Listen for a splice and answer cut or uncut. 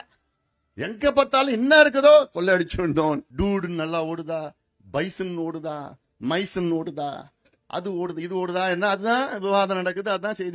cut